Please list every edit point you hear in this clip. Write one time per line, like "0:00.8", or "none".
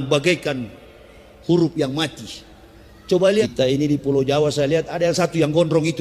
0:03.4